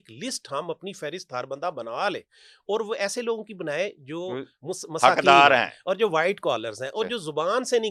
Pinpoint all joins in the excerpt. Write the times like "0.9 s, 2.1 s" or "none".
none